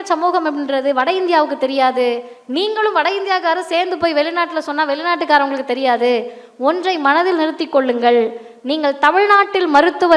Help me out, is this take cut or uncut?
uncut